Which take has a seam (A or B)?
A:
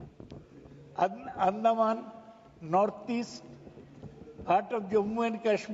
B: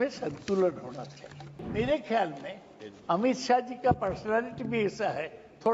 B